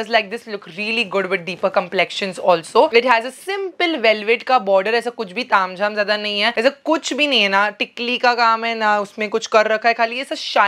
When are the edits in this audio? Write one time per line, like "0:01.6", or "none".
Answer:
none

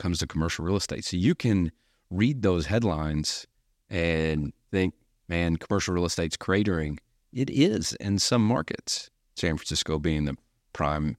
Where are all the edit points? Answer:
0:04.6
0:09.5

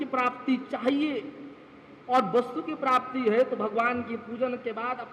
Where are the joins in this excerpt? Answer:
none

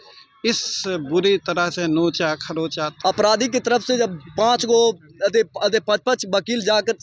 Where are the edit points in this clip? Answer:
0:02.8

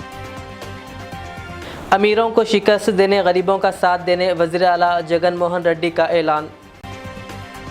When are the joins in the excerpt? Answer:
0:01.6

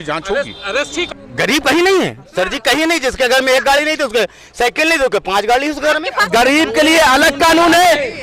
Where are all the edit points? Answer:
0:01.1
0:06.2

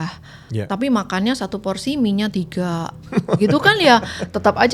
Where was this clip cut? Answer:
none

